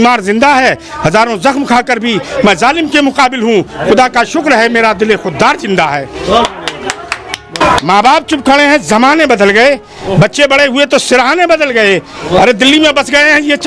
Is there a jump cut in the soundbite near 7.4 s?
yes; 1 cut; at 7.4 s

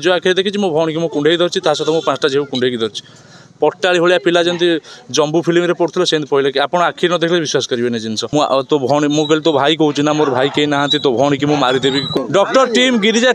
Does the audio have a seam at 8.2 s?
yes; 2 cuts; at 8.2 s, 12.2 s

